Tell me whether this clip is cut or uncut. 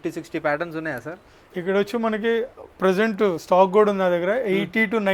uncut